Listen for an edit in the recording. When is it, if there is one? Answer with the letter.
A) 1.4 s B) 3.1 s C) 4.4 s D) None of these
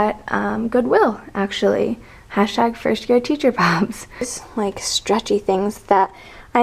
C